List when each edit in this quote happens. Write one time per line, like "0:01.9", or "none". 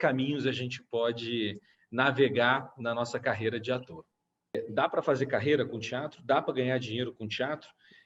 0:04.4